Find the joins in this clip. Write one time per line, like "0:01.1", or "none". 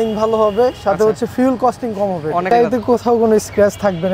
0:02.5